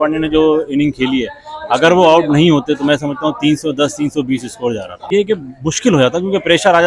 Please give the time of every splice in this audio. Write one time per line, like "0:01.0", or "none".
none